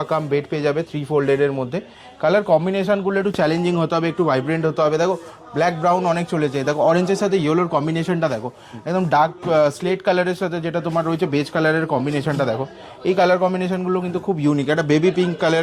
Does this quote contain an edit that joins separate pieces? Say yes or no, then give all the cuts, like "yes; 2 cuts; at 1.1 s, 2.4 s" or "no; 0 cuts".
no; 0 cuts